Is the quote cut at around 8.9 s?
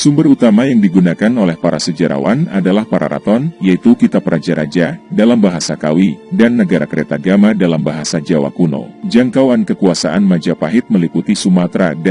yes; 1 cut; at 8.9 s

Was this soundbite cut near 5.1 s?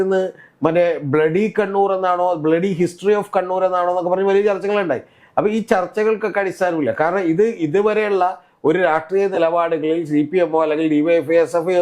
no; 0 cuts

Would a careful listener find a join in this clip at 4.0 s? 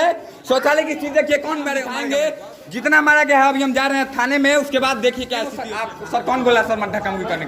no; 2 cuts; at 1.9 s, 5.6 s

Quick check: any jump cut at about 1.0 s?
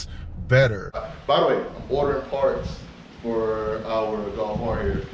yes; 1 cut; at 1.0 s

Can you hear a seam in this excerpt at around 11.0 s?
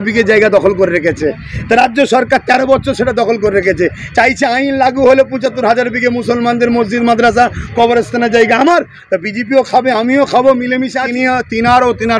yes; 1 cut; at 11.0 s

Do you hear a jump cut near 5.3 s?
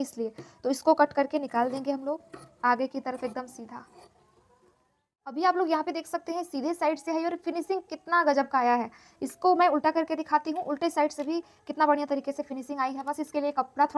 yes; 1 cut; at 5.3 s

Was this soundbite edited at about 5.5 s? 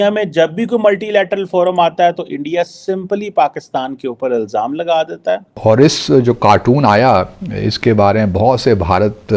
yes; 1 cut; at 5.5 s

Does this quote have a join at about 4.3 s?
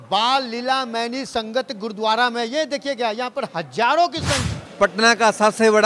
yes; 1 cut; at 4.3 s

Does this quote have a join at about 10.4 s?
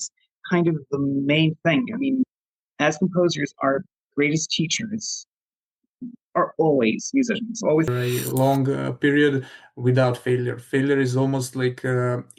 no; 1 cut; at 7.9 s

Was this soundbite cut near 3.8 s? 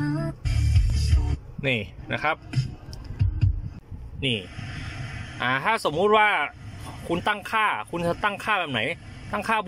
yes; 1 cut; at 3.8 s

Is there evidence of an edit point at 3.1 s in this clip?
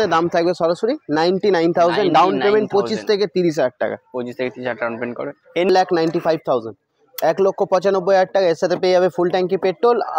no; 1 cut; at 5.7 s

